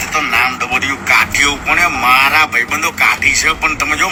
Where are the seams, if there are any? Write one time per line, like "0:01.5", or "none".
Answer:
none